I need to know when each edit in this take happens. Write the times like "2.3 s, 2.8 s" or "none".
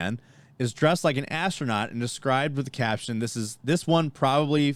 none